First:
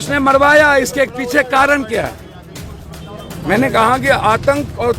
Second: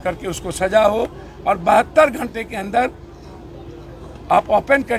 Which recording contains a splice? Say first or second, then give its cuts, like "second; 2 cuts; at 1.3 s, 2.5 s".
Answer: first; 1 cut; at 3.4 s